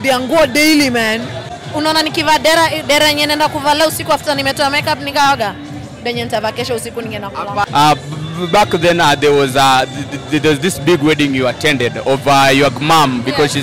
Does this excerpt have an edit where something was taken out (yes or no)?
yes